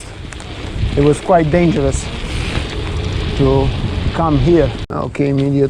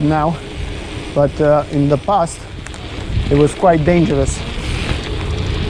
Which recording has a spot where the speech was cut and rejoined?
first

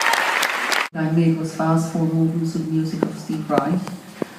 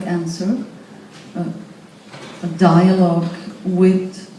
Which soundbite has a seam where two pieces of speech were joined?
second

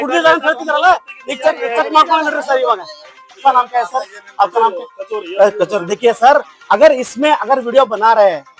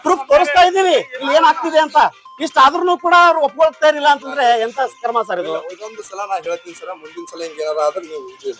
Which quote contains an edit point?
first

